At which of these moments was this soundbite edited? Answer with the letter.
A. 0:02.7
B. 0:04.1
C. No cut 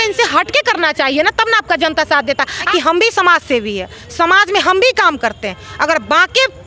A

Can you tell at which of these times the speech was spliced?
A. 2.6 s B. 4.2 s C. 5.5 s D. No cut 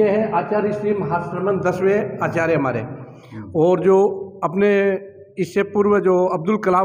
D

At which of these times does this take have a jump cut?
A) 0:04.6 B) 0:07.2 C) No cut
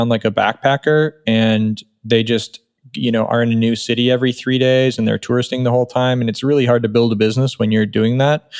C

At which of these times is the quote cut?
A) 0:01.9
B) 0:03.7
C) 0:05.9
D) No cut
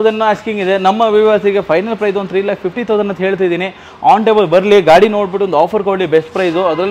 D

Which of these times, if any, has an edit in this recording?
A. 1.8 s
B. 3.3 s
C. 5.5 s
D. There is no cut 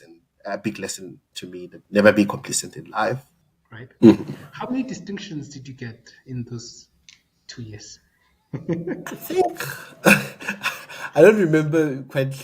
B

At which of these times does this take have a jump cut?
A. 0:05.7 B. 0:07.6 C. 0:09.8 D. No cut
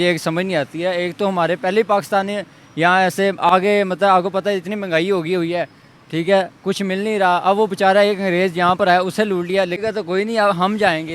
C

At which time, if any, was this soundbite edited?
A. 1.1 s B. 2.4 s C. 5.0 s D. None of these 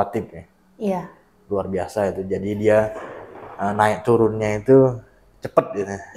D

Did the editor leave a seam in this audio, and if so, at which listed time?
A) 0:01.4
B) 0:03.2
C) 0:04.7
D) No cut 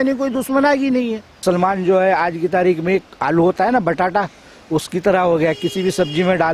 A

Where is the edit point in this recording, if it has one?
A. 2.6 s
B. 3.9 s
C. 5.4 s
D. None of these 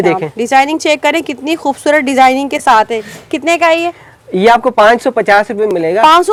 D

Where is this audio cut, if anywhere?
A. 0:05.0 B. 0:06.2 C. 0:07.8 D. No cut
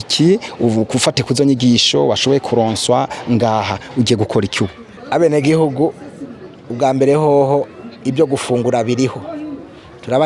A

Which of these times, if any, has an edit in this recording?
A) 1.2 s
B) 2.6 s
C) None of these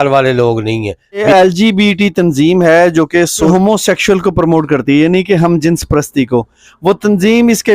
A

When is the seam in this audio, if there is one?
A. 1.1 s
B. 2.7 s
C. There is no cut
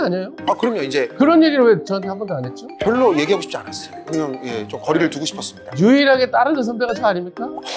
A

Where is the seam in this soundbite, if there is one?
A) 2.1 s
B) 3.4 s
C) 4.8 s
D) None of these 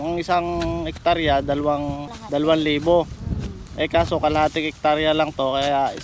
A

